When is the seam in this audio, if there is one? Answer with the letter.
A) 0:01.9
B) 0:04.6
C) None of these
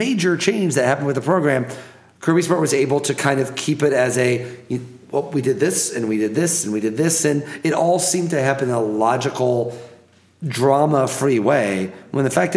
C